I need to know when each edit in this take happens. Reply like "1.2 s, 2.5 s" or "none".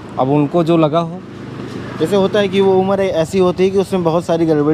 none